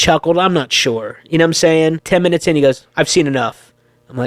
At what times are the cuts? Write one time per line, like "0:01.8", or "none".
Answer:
0:02.0